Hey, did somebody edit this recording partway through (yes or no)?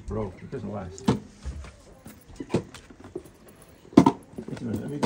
no